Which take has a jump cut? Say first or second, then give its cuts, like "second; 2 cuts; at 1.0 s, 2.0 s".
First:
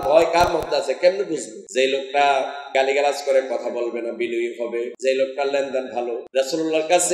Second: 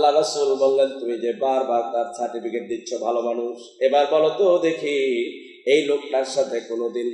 first; 4 cuts; at 1.6 s, 2.6 s, 4.9 s, 6.2 s